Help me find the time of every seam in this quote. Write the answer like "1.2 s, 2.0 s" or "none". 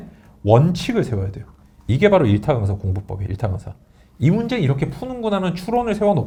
none